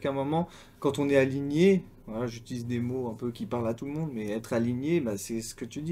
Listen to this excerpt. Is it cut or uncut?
uncut